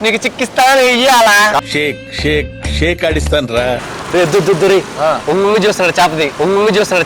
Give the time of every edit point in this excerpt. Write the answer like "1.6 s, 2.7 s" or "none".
3.8 s